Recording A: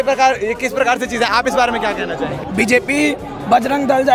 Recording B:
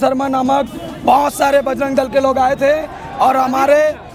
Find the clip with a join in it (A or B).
A